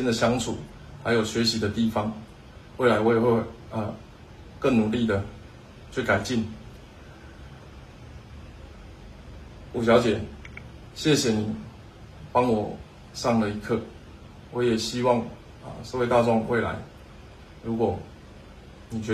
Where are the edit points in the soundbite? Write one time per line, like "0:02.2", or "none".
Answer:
none